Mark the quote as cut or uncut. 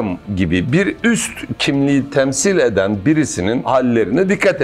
cut